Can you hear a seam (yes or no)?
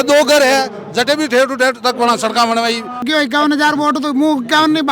yes